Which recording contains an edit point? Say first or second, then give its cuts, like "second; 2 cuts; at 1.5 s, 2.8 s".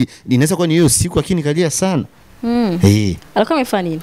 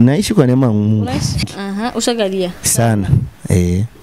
second; 1 cut; at 1.5 s